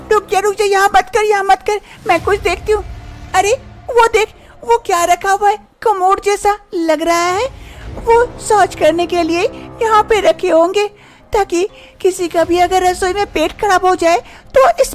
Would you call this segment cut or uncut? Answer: uncut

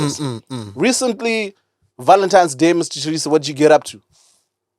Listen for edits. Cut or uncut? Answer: uncut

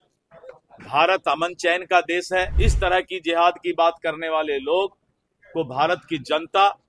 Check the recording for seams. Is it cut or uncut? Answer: cut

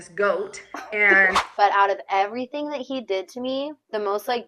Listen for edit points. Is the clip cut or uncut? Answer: cut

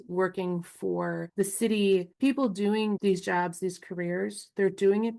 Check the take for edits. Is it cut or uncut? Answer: uncut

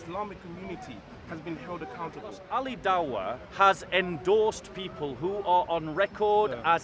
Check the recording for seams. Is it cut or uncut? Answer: cut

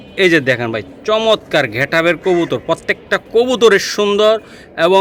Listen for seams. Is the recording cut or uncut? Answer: uncut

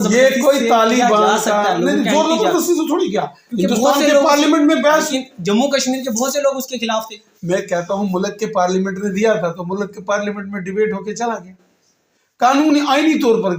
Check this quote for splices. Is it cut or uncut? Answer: uncut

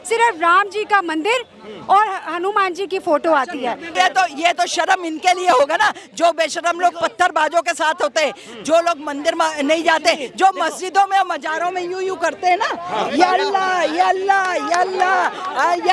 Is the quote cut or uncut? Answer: cut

